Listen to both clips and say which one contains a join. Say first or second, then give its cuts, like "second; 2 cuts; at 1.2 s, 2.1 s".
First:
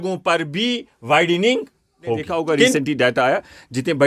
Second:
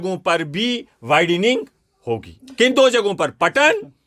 first; 1 cut; at 2.7 s